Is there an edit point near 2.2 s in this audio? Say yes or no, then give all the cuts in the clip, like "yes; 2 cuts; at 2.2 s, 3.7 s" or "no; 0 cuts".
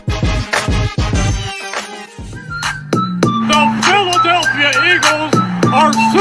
yes; 1 cut; at 2.2 s